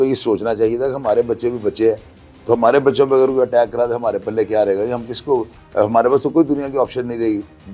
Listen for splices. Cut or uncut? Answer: uncut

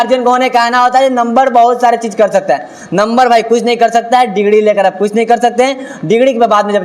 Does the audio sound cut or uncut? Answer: uncut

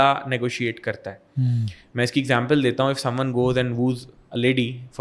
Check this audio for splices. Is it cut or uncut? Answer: uncut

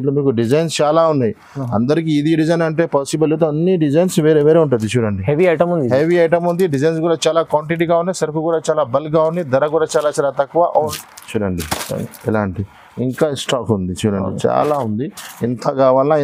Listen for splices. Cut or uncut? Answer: cut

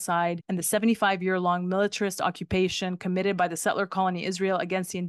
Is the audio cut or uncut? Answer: uncut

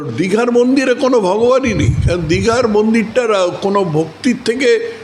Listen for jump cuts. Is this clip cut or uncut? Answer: uncut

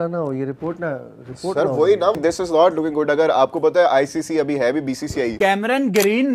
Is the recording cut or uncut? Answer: cut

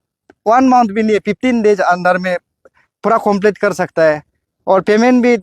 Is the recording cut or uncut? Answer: uncut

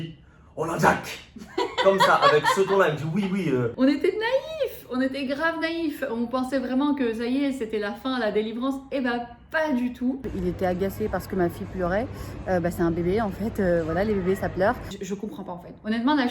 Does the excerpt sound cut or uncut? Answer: cut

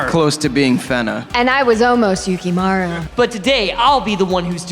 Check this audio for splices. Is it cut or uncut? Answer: cut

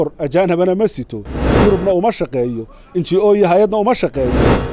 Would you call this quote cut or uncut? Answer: uncut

